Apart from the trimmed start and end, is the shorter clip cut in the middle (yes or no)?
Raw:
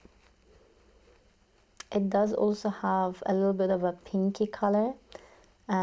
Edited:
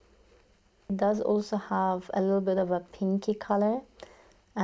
yes